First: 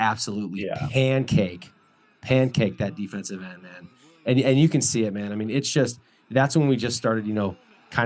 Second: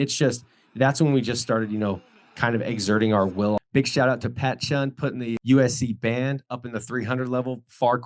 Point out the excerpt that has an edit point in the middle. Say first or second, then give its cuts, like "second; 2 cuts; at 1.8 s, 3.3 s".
second; 1 cut; at 3.6 s